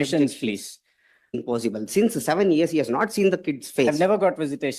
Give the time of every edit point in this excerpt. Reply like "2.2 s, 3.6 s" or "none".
1.4 s